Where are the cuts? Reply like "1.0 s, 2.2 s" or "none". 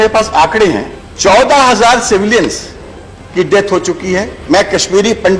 1.4 s, 4.4 s